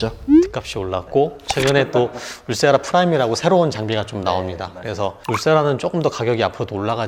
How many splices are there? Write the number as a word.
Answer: zero